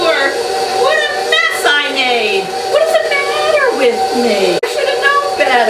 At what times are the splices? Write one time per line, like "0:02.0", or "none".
0:04.6